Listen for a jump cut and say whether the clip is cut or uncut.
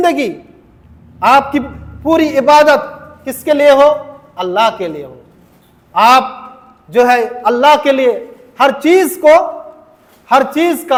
uncut